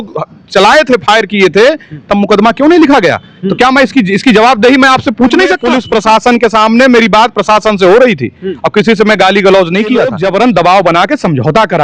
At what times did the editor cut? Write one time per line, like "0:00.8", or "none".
0:05.7
0:10.1